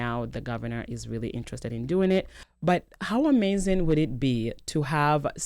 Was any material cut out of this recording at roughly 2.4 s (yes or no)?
yes